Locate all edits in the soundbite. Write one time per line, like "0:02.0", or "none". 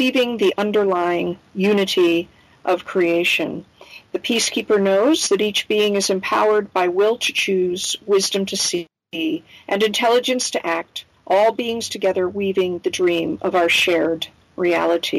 none